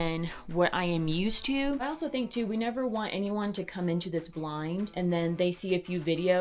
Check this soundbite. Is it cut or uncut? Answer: cut